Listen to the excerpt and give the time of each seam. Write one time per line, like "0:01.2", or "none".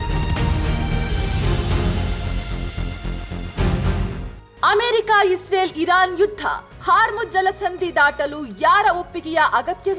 0:04.2